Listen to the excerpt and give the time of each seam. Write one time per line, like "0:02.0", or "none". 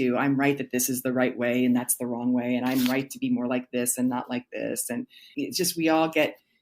0:05.3